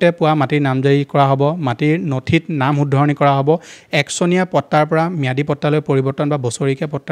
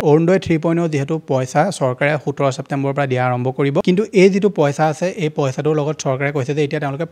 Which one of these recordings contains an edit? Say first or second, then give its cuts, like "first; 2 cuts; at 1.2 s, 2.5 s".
second; 1 cut; at 3.8 s